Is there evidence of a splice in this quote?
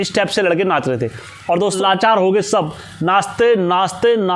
yes; 1 cut; at 1.8 s

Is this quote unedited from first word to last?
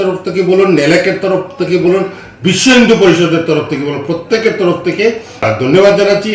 no; 1 cut; at 5.5 s

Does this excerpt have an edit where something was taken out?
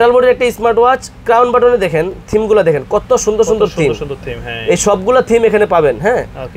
no; 0 cuts

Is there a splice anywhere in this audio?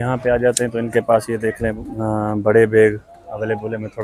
no; 0 cuts

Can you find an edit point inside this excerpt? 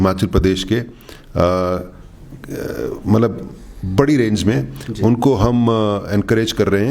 no; 0 cuts

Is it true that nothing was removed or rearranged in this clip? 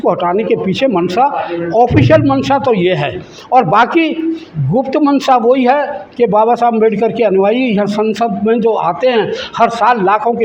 yes; 0 cuts

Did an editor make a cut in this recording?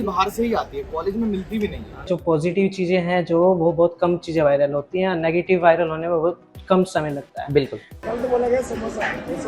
yes; 2 cuts; at 2.1 s, 7.8 s

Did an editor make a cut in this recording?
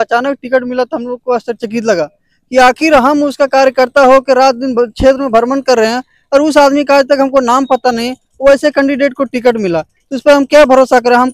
no; 0 cuts

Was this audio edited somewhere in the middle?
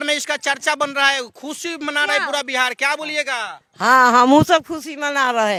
no; 0 cuts

